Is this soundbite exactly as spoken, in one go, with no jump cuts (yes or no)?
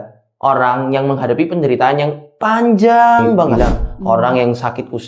no